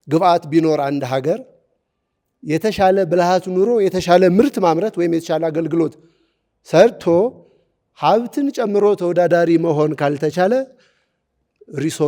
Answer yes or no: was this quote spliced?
no